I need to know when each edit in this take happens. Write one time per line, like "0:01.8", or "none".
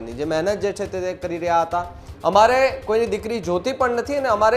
0:02.0